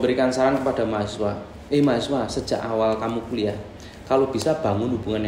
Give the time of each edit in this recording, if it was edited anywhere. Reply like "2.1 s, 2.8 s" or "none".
none